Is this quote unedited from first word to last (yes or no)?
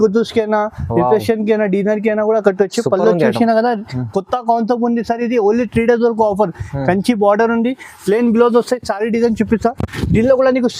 yes